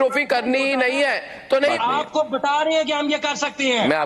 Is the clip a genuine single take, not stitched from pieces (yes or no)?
no